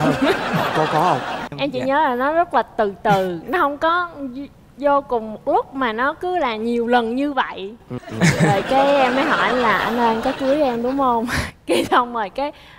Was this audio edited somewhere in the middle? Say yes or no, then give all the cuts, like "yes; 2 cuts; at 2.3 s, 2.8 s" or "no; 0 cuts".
yes; 2 cuts; at 1.4 s, 8.0 s